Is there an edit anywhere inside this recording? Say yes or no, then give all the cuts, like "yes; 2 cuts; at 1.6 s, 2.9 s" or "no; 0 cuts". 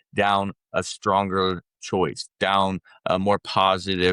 no; 0 cuts